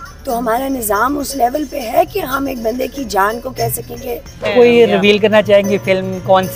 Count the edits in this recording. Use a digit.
1